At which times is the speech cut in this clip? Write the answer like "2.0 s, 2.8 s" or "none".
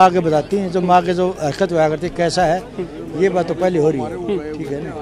none